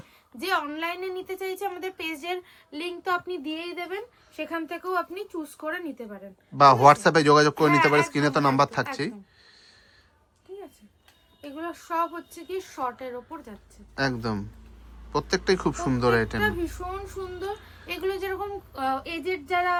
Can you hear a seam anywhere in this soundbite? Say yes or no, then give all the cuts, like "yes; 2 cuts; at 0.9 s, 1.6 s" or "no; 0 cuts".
no; 0 cuts